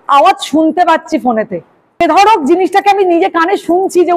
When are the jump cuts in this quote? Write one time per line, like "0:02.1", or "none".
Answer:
0:02.0